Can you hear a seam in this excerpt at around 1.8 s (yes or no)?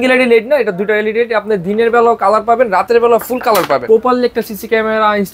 no